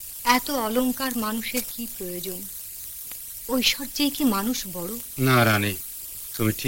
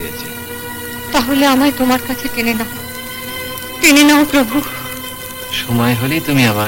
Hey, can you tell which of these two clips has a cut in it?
first; 1 cut; at 5.0 s

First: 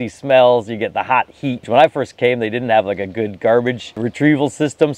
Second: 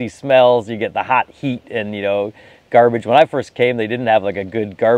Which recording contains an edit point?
first; 2 cuts; at 1.6 s, 4.0 s

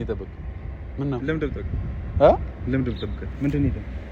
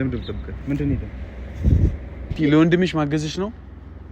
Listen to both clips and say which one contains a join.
second; 1 cut; at 2.4 s

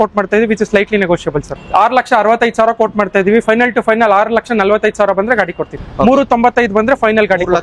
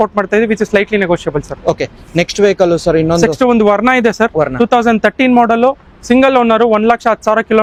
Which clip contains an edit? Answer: first; 2 cuts; at 1.5 s, 5.8 s

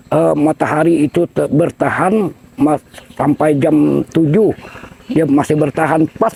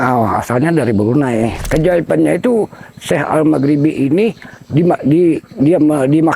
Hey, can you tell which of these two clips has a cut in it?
second; 1 cut; at 1.6 s

